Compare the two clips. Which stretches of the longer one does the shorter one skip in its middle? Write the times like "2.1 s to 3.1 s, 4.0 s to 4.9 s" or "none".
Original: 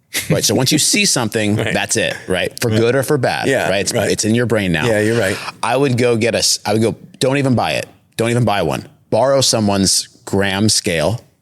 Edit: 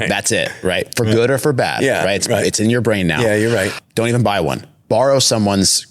5.4 s to 8.0 s